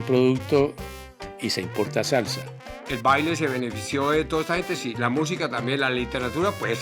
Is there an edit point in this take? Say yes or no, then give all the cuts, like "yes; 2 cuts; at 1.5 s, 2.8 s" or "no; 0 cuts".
yes; 1 cut; at 2.8 s